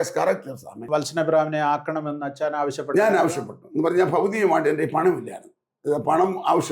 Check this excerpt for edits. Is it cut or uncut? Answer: cut